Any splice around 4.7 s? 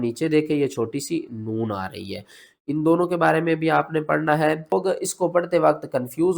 yes; 1 cut; at 4.7 s

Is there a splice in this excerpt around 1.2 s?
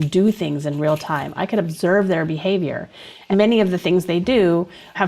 no; 1 cut; at 3.2 s

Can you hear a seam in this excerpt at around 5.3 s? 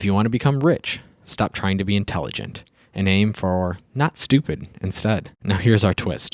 yes; 1 cut; at 5.3 s

